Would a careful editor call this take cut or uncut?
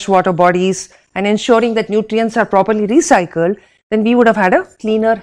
uncut